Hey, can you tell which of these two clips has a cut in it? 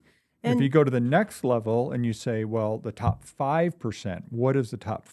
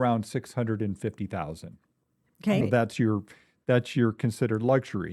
second; 1 cut; at 2.6 s

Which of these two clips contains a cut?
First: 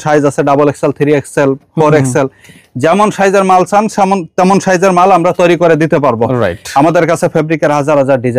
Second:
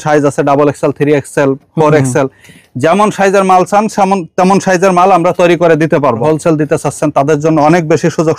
second; 1 cut; at 6.2 s

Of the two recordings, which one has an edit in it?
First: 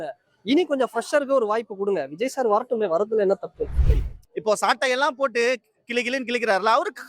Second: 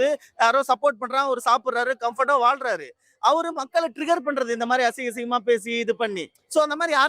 first; 1 cut; at 3.9 s

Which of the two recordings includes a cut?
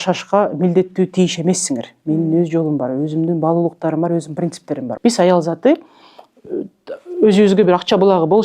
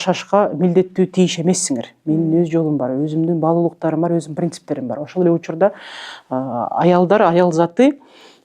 first; 1 cut; at 4.9 s

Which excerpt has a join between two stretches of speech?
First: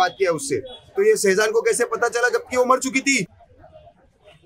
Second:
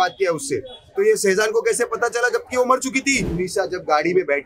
second; 1 cut; at 3.3 s

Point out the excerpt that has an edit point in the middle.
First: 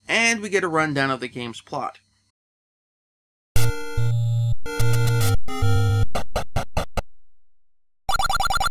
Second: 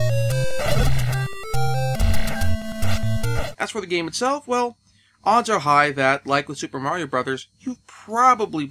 second; 1 cut; at 1.1 s

